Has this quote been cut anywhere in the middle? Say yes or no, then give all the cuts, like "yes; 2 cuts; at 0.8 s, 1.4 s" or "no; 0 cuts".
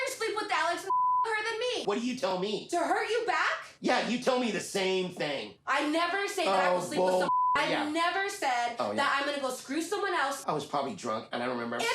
no; 0 cuts